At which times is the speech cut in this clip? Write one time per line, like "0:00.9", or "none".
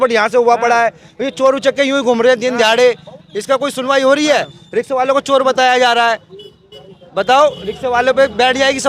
none